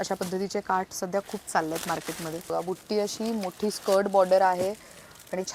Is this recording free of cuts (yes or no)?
no